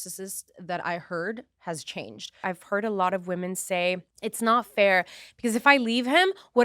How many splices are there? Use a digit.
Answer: 2